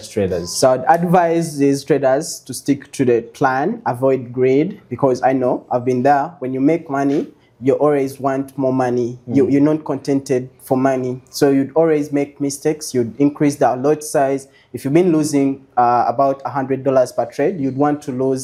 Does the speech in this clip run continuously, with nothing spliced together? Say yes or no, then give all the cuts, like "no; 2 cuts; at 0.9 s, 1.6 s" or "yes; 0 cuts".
yes; 0 cuts